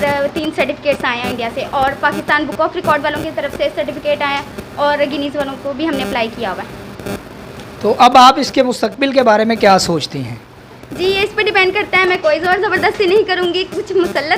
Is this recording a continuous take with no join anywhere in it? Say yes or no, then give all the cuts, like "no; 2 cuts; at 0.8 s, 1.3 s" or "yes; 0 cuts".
yes; 0 cuts